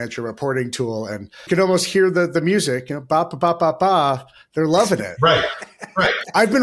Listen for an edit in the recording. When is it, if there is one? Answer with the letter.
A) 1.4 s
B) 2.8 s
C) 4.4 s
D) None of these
A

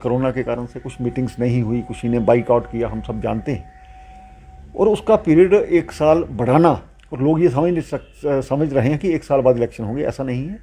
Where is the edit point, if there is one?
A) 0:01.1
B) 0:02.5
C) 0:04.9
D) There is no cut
D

